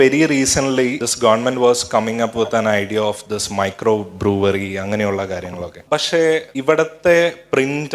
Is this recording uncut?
no; 3 cuts; at 1.0 s, 5.7 s, 6.5 s

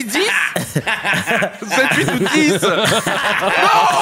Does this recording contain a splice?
no; 0 cuts

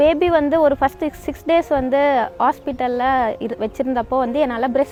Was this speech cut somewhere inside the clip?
no; 0 cuts

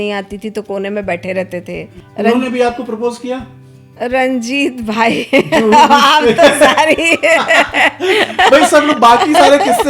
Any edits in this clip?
yes; 1 cut; at 2.0 s

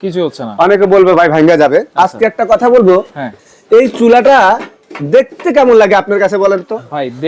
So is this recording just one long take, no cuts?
yes; 0 cuts

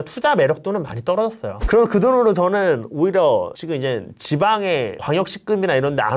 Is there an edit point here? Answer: yes; 1 cut; at 1.5 s

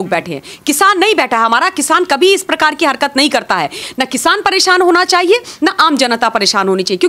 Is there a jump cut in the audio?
yes; 1 cut; at 3.8 s

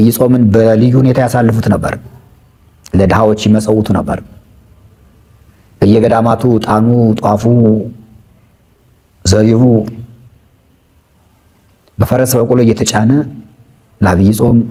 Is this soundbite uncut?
yes; 0 cuts

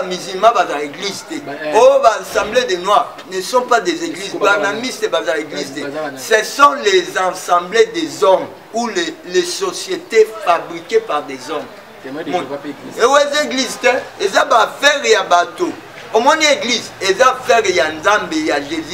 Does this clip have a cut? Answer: no; 0 cuts

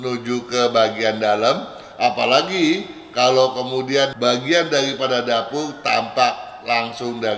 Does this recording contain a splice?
yes; 1 cut; at 4.1 s

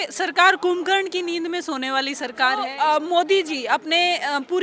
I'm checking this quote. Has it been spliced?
yes; 1 cut; at 2.7 s

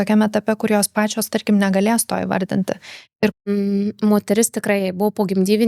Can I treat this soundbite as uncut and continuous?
no; 1 cut; at 3.5 s

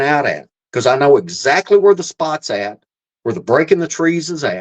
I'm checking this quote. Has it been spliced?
no; 0 cuts

